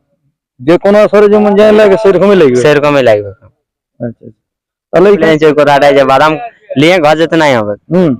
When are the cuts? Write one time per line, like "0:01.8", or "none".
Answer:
0:05.2